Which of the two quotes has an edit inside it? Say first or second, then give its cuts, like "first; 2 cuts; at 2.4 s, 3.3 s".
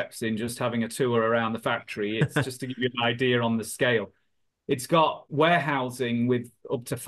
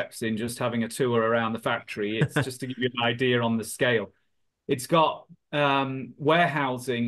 first; 1 cut; at 5.2 s